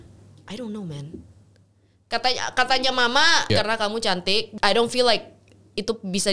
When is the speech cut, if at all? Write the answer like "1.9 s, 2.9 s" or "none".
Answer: 3.5 s, 4.5 s